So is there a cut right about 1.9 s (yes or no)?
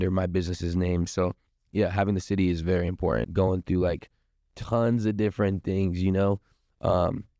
no